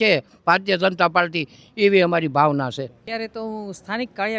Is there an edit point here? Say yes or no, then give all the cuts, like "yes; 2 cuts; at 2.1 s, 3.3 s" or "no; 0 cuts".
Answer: yes; 1 cut; at 3.0 s